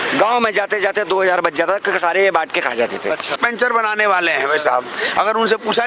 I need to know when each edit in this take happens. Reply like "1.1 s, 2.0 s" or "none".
3.4 s